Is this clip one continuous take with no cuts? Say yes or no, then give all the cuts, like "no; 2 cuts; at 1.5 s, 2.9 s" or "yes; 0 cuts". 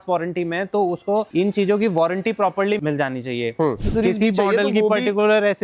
no; 3 cuts; at 1.3 s, 2.8 s, 3.8 s